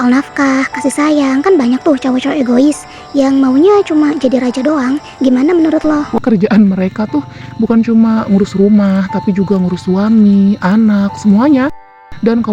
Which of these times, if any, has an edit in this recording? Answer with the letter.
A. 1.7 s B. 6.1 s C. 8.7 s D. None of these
B